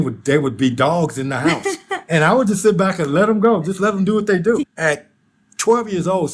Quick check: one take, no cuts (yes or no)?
no